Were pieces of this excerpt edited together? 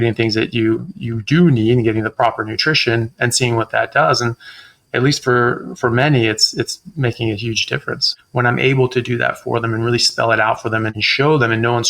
yes; 2 cuts; at 8.2 s, 11.0 s

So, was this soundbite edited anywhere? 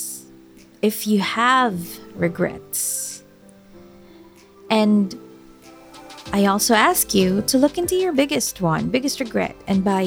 no; 0 cuts

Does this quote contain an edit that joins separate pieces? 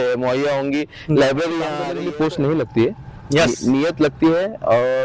yes; 1 cut; at 1.9 s

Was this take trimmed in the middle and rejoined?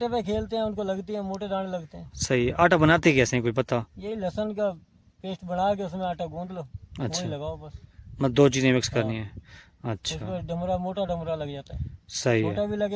no; 0 cuts

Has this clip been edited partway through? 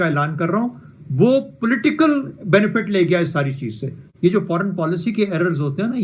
yes; 1 cut; at 4.0 s

